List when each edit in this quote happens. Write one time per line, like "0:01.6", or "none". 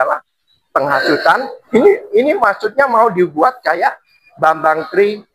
0:01.6